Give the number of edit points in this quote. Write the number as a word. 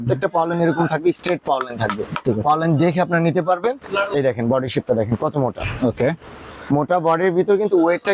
one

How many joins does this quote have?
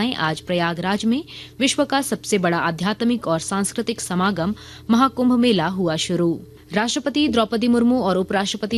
zero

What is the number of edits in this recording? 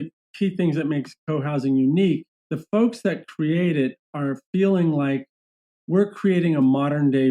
one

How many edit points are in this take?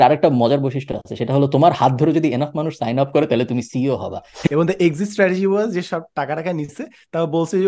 one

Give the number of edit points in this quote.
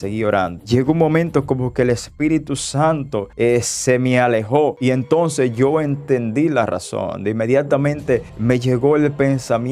one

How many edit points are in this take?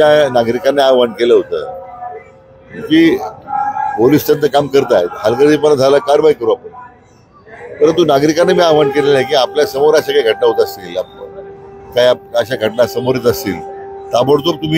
zero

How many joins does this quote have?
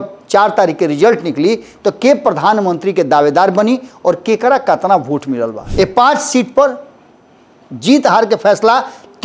one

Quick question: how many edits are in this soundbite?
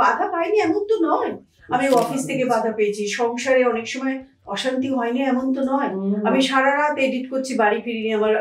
zero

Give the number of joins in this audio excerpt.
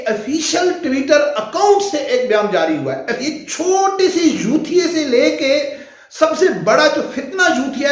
one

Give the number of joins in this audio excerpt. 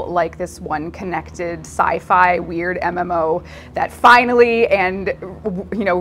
zero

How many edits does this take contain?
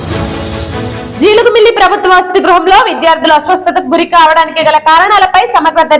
one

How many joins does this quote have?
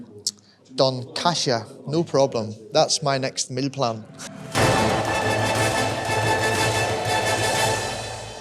one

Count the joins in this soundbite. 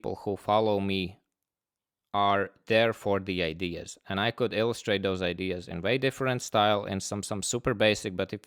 zero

